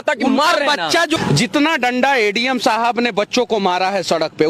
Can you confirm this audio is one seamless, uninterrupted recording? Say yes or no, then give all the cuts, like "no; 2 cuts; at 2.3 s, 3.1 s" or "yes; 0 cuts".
no; 1 cut; at 1.2 s